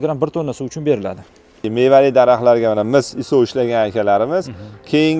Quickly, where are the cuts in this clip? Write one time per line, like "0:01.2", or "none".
0:01.6